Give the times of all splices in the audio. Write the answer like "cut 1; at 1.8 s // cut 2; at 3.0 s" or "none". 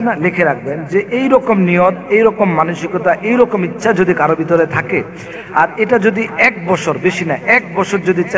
none